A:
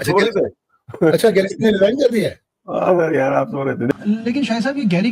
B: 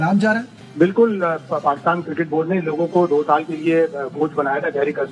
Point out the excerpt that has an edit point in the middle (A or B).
A